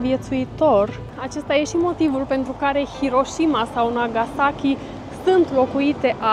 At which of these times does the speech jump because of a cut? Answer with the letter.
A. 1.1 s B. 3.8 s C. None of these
A